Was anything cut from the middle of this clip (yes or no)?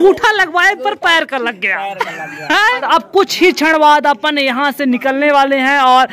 yes